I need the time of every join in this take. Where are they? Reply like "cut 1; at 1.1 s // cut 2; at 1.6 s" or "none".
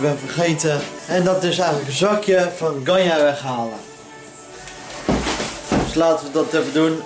cut 1; at 0.9 s

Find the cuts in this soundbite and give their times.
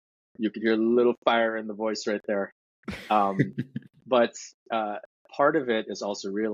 none

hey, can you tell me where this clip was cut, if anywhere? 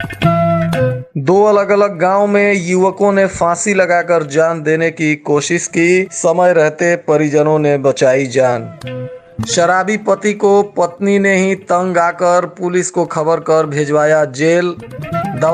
cut 1; at 1.1 s

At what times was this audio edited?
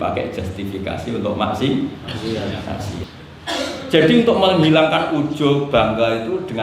cut 1; at 3.0 s

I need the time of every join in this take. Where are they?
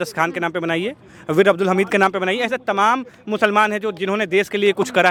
none

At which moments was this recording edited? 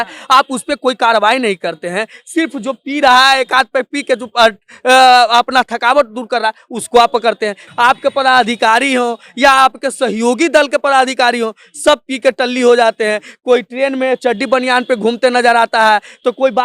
cut 1; at 7.7 s

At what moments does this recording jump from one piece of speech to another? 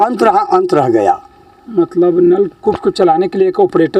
none

